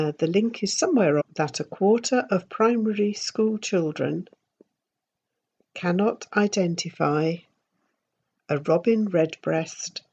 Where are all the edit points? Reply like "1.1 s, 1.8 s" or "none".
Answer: none